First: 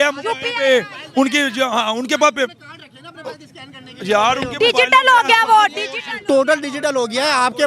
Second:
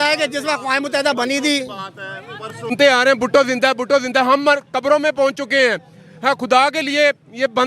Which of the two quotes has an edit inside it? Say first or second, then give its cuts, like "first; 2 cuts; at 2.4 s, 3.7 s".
second; 1 cut; at 2.7 s